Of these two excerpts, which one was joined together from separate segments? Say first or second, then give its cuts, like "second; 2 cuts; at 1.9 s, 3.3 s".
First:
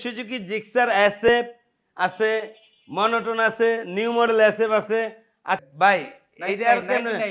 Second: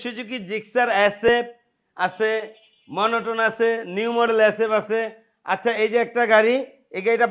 first; 1 cut; at 5.6 s